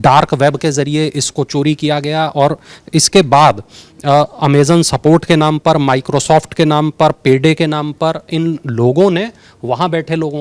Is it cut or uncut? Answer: uncut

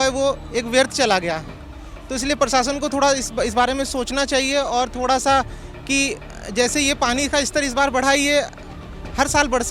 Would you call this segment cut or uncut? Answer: uncut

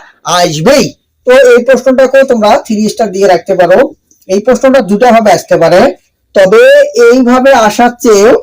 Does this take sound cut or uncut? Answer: cut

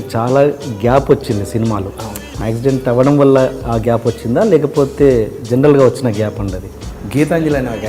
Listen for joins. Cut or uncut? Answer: cut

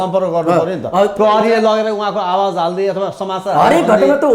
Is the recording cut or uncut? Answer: uncut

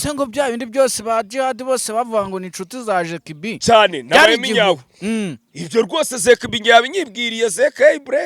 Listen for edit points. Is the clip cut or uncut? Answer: uncut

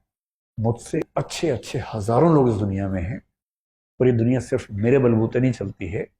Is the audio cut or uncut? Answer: cut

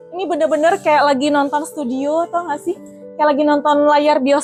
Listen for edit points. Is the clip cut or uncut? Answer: uncut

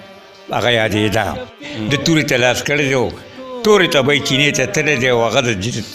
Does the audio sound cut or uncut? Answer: cut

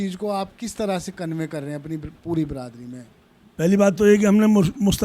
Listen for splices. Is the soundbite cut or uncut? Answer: uncut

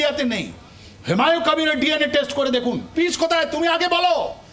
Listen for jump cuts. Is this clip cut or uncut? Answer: cut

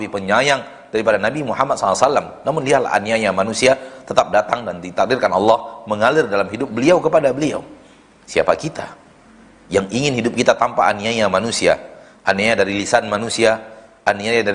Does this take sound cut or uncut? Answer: uncut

